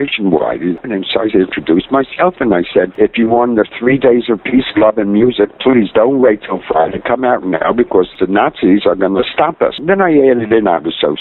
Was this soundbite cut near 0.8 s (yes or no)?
yes